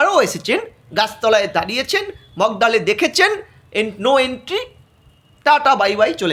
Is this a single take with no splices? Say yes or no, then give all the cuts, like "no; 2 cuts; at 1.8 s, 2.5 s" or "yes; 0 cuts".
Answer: yes; 0 cuts